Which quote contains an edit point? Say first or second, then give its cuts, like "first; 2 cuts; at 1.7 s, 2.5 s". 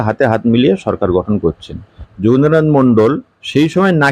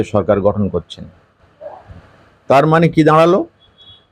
first; 1 cut; at 2.0 s